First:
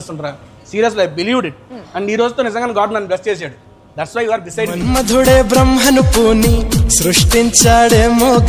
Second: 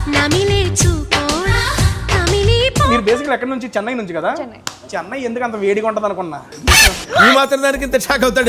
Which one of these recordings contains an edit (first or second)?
second